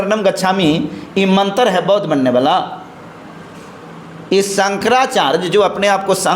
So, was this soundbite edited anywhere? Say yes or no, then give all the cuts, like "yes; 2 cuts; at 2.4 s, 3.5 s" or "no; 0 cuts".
no; 0 cuts